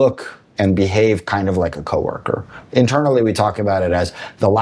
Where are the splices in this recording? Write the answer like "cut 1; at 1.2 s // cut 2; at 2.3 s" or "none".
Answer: cut 1; at 2.6 s